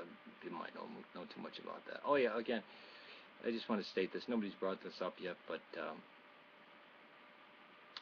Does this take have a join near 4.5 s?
yes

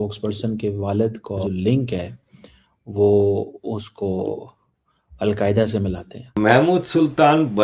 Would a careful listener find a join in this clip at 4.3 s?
no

